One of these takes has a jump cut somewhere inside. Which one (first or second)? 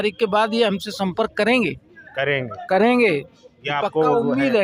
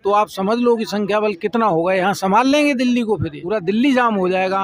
second